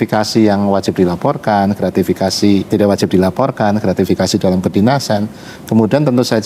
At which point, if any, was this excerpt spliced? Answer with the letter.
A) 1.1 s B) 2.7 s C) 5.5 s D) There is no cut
B